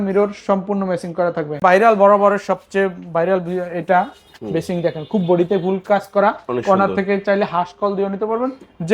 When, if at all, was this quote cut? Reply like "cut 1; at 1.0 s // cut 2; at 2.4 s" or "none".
cut 1; at 1.6 s